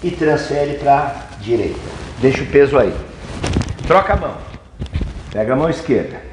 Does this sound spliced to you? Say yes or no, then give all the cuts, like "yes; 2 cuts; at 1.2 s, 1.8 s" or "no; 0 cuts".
no; 0 cuts